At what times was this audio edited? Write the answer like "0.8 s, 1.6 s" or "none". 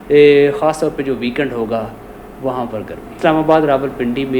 3.1 s